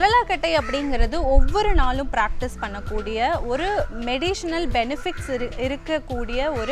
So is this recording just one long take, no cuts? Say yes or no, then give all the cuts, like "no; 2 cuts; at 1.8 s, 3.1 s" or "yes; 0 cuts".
yes; 0 cuts